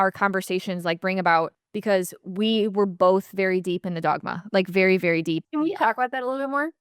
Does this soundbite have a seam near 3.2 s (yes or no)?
no